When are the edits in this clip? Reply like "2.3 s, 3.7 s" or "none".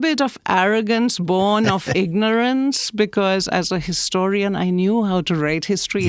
none